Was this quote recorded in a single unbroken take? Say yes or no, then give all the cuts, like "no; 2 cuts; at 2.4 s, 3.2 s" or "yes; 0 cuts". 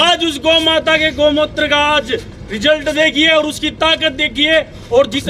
yes; 0 cuts